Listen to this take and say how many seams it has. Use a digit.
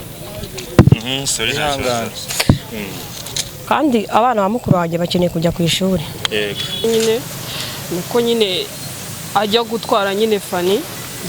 1